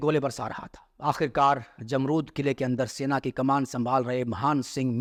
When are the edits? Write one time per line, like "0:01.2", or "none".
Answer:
none